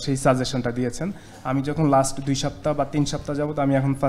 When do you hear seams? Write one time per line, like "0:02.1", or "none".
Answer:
none

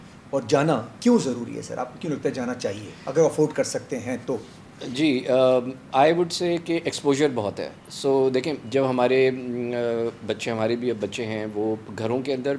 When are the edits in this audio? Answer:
none

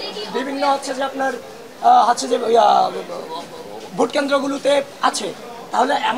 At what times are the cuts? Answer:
none

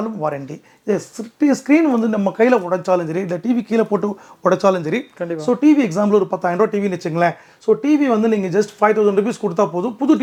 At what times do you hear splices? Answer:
none

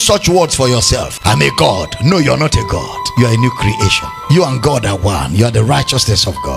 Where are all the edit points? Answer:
0:01.1
0:03.0
0:04.1

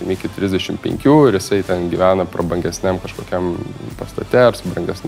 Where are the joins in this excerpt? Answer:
none

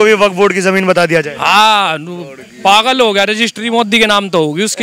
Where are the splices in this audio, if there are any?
none

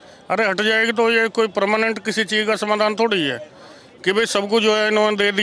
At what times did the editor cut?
none

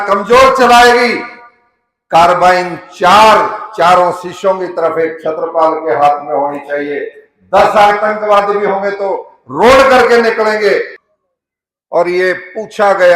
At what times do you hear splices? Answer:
0:11.0

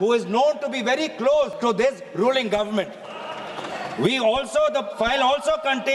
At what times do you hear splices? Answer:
0:01.5

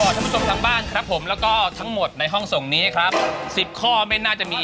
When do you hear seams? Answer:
0:03.4

